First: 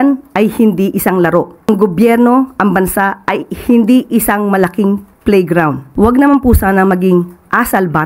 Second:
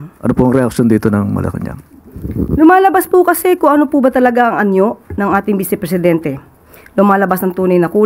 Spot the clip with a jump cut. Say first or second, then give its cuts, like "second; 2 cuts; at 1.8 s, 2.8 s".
first; 2 cuts; at 1.7 s, 5.8 s